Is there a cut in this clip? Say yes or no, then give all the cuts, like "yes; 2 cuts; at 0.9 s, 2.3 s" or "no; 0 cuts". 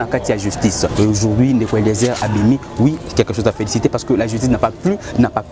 yes; 1 cut; at 0.9 s